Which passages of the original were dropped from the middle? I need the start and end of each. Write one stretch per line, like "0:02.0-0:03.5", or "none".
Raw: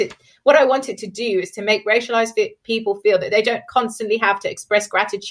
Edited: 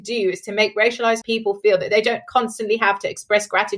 0:02.3-0:02.6